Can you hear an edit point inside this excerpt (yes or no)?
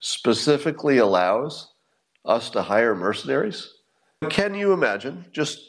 yes